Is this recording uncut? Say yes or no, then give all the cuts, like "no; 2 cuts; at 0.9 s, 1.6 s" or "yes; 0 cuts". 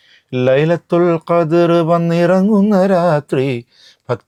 yes; 0 cuts